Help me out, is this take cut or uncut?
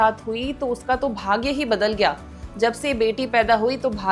uncut